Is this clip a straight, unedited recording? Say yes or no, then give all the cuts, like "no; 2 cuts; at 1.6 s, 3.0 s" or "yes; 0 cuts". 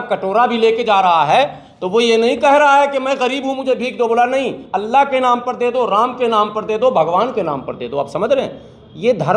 yes; 0 cuts